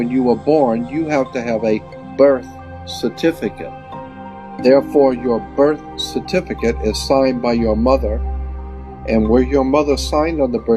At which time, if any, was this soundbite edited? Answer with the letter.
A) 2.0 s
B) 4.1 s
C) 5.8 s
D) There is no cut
B